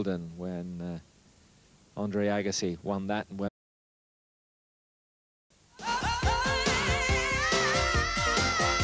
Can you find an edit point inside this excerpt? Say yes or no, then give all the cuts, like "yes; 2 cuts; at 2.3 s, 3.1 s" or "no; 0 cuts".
no; 0 cuts